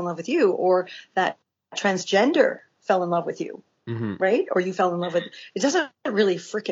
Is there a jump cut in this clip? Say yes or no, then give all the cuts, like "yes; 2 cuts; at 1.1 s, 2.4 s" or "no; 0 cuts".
no; 0 cuts